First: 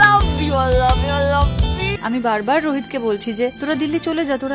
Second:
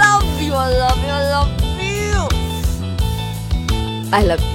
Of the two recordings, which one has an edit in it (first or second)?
first